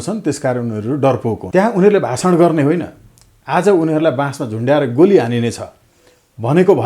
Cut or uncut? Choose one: cut